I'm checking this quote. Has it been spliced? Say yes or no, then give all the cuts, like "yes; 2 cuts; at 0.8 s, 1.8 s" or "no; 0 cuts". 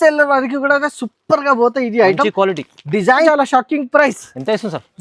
yes; 1 cut; at 3.3 s